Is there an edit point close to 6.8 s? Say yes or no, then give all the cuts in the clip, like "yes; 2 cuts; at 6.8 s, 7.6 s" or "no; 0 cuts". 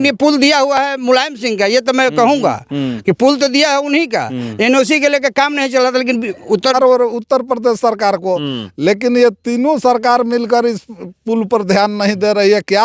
yes; 1 cut; at 6.8 s